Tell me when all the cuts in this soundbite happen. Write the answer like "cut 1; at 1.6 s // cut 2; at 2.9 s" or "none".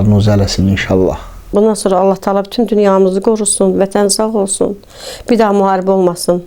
cut 1; at 1.5 s